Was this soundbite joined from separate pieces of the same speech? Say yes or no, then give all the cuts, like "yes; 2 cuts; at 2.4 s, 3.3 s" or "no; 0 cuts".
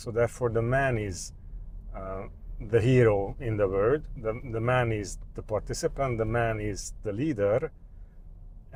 no; 0 cuts